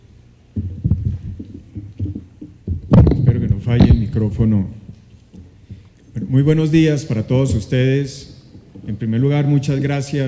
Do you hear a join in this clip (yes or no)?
no